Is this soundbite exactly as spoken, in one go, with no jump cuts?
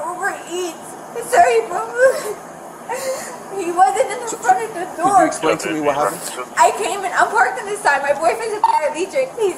yes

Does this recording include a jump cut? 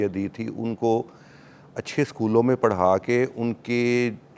no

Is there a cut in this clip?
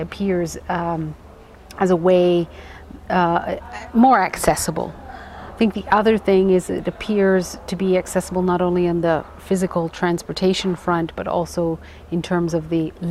no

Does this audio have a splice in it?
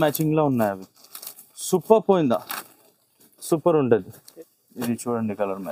yes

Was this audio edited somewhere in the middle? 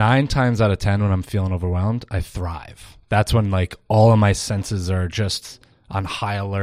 no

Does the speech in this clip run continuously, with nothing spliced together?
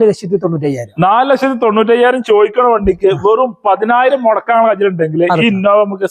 yes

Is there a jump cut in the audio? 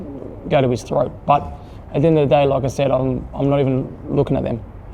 no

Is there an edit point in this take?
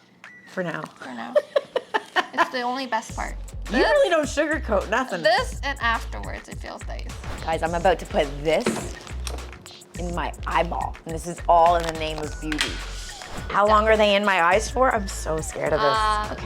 yes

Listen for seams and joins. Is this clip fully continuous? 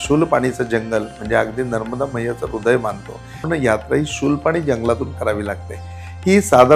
no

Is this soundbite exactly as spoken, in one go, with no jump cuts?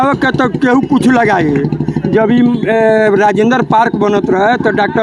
yes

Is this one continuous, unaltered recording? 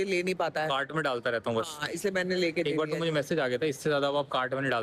yes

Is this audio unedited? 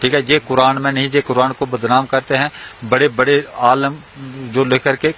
yes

